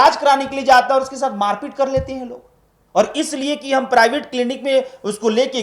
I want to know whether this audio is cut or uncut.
uncut